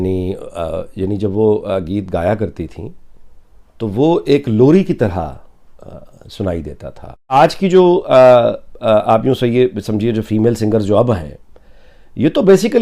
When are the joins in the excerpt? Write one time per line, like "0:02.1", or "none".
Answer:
0:07.3